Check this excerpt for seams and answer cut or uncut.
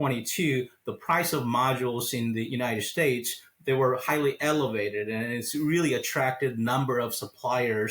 uncut